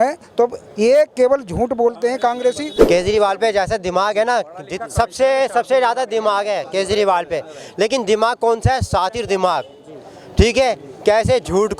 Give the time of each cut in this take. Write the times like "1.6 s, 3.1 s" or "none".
2.7 s